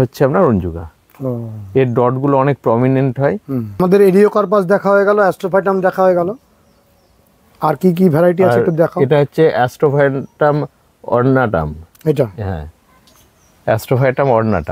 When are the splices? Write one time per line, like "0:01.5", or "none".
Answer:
0:03.8